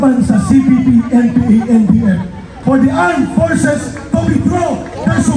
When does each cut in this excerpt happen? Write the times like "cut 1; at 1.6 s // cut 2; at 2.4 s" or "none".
cut 1; at 2.5 s